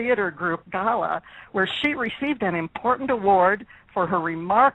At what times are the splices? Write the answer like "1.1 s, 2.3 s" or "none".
0.9 s